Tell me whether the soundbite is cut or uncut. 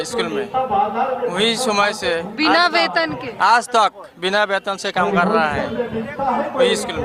uncut